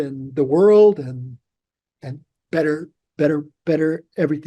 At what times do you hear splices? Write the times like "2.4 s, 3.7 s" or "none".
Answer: none